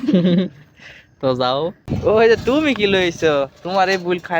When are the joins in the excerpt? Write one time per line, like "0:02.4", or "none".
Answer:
0:01.8

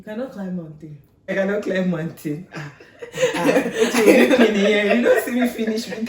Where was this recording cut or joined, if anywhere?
0:01.3

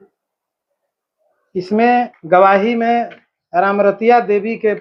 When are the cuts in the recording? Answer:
0:02.2

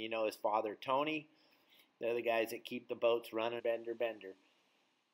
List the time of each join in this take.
0:03.6

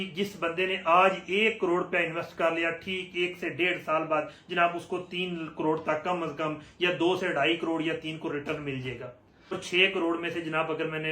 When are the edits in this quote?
0:09.6

